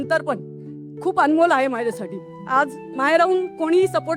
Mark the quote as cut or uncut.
cut